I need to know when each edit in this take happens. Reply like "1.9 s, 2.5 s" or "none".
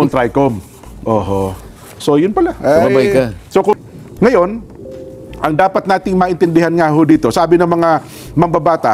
3.7 s